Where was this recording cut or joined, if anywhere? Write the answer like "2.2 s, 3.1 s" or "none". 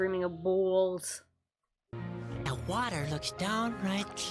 1.9 s